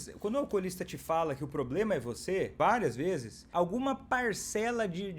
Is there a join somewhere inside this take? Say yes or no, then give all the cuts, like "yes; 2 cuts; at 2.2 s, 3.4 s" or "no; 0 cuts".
yes; 2 cuts; at 2.5 s, 3.4 s